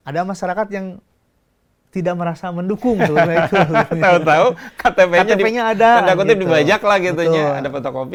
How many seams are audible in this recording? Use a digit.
0